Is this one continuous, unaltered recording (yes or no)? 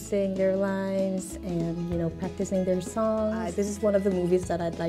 no